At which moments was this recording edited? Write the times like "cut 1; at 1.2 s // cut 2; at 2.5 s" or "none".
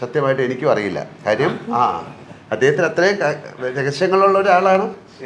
none